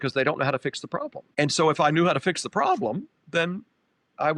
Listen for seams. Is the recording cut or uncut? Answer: cut